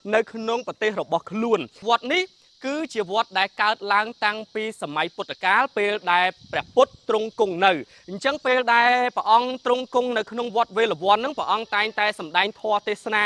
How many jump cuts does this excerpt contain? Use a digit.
1